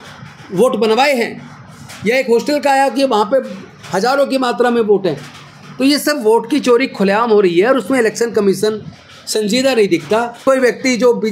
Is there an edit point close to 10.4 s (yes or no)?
yes